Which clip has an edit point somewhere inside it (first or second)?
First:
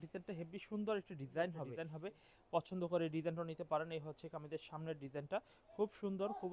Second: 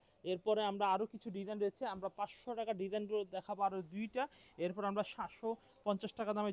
first